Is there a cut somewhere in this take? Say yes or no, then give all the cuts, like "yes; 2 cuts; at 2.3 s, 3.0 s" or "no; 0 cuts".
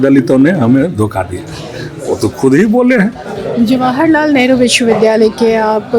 yes; 1 cut; at 3.3 s